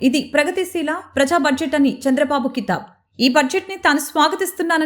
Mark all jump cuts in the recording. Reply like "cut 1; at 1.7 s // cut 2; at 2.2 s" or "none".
none